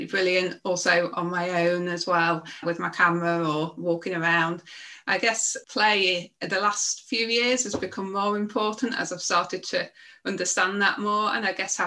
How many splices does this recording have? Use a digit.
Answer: 1